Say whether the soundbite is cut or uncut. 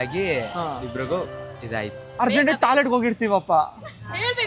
cut